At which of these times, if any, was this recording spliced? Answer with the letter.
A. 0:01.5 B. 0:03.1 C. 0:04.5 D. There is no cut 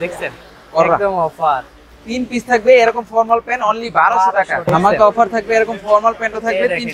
C